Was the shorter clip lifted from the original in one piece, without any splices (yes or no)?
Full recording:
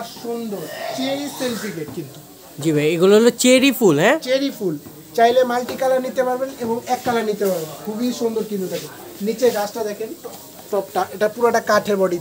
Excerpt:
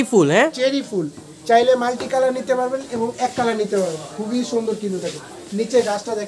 yes